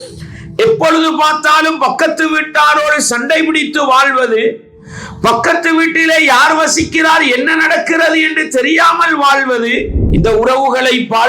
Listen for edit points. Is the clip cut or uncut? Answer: cut